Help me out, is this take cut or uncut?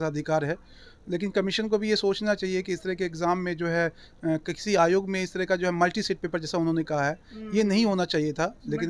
uncut